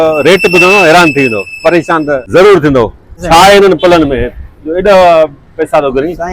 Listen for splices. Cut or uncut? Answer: cut